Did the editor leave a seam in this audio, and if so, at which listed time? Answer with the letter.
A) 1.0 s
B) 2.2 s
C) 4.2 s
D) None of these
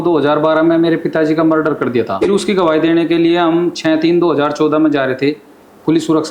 B